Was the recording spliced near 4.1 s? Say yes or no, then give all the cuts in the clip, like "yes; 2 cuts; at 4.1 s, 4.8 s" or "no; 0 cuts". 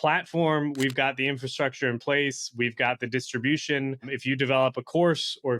yes; 1 cut; at 4.1 s